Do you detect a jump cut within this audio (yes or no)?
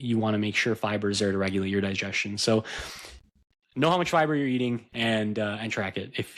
no